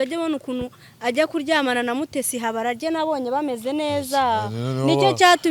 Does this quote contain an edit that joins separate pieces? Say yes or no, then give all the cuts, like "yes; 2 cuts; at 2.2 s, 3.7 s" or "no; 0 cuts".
no; 0 cuts